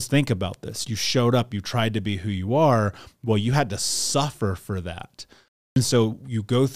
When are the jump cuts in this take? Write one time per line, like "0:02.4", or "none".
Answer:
0:05.8